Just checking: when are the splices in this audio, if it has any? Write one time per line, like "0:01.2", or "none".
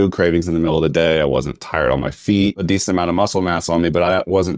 0:02.6